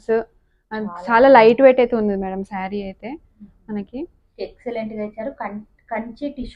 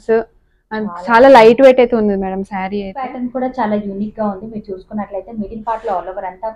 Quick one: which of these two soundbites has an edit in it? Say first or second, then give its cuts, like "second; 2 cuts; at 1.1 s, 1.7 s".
second; 1 cut; at 3.1 s